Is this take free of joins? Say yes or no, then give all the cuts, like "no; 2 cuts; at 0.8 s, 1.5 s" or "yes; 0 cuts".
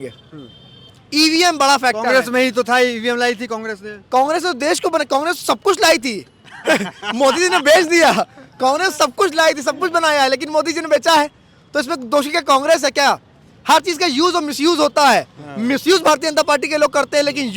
yes; 0 cuts